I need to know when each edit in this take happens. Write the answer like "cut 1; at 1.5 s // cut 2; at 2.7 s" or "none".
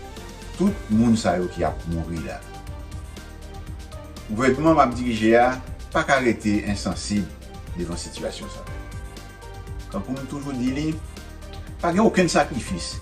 cut 1; at 2.4 s // cut 2; at 4.3 s